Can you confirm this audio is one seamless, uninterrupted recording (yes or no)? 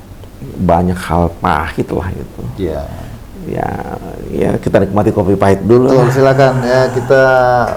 yes